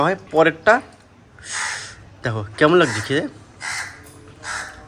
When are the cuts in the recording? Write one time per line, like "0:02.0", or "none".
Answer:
none